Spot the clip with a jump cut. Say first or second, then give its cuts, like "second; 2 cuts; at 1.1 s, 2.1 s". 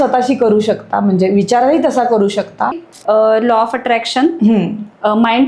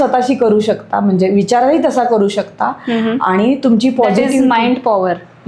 first; 1 cut; at 2.8 s